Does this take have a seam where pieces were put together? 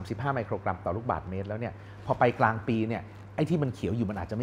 no; 0 cuts

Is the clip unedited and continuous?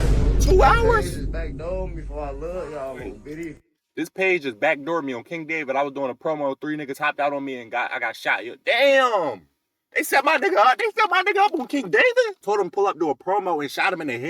no; 1 cut; at 12.4 s

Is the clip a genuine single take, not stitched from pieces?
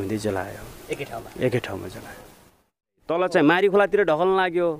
no; 1 cut; at 2.8 s

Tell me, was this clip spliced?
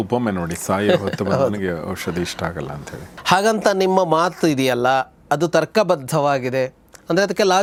no; 0 cuts

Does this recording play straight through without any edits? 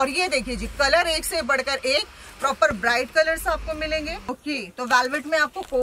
no; 1 cut; at 4.2 s

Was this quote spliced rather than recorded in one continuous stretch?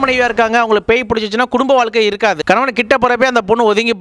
no; 0 cuts

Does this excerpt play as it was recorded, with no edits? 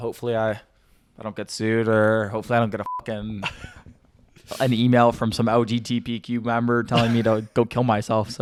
yes; 0 cuts

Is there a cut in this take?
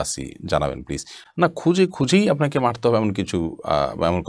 no; 0 cuts

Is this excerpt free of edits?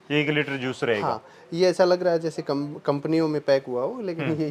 yes; 0 cuts

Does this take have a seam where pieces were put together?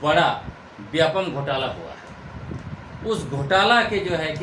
no; 0 cuts

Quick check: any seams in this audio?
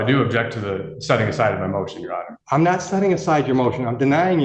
yes; 1 cut; at 2.3 s

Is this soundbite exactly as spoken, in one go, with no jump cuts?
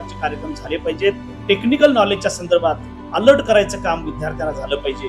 no; 1 cut; at 1.3 s

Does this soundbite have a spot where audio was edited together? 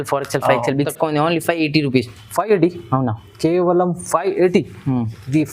yes; 1 cut; at 0.9 s

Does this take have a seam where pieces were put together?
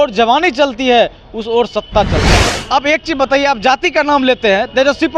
yes; 1 cut; at 2.5 s

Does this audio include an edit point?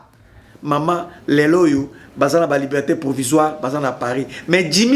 no; 0 cuts

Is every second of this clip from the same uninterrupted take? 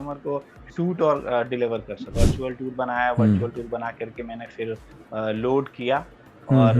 no; 1 cut; at 2.1 s

